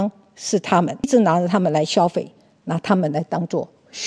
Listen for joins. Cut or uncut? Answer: cut